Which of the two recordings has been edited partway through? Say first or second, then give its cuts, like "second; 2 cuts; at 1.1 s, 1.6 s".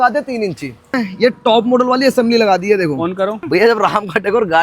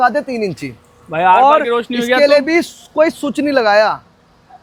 first; 2 cuts; at 1.0 s, 3.4 s